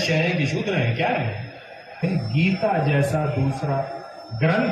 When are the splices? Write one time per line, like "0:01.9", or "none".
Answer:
0:02.0

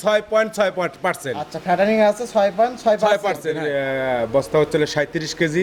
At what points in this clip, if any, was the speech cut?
0:03.6

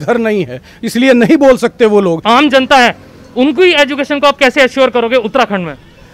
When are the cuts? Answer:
0:02.2

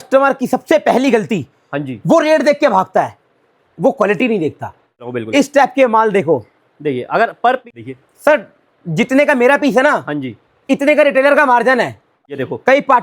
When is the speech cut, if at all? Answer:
0:05.1
0:07.7
0:12.1

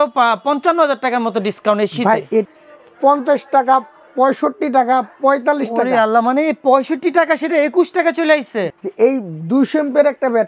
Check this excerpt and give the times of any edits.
0:02.5
0:08.7

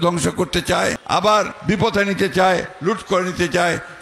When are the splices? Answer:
0:01.4
0:02.7

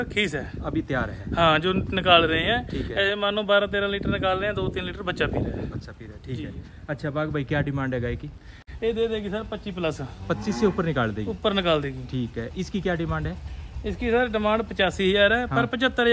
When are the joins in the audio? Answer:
0:08.6

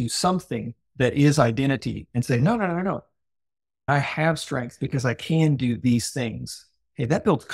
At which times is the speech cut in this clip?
0:03.9

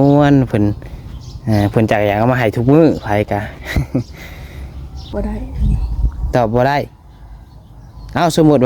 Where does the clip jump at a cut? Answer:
0:04.9

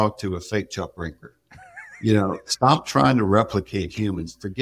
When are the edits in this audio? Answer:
none

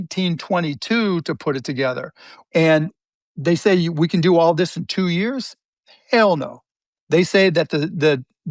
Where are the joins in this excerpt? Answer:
0:02.3

